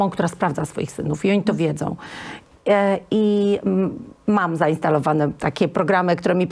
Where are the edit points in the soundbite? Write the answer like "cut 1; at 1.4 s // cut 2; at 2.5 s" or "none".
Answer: none